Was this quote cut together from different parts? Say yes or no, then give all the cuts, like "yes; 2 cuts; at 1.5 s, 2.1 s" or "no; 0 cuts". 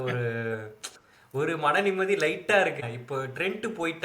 yes; 1 cut; at 2.8 s